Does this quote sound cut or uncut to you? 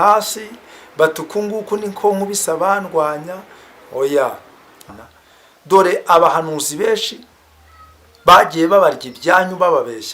cut